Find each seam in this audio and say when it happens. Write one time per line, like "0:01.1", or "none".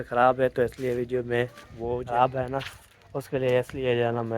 0:02.1